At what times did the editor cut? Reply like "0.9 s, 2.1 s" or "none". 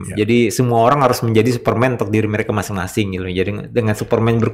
none